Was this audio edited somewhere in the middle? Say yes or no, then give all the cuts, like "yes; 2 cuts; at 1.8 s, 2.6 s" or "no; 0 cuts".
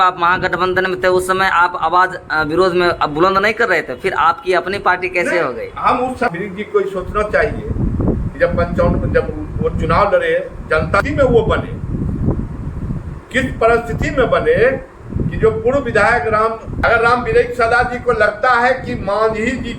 yes; 3 cuts; at 6.3 s, 11.0 s, 16.7 s